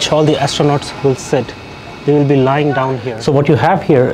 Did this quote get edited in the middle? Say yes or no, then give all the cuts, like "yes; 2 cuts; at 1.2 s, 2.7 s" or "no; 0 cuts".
yes; 1 cut; at 3.1 s